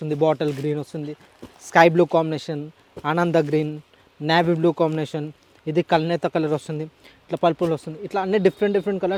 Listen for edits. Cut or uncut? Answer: uncut